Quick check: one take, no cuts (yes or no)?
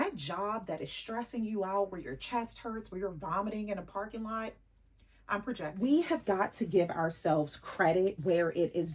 no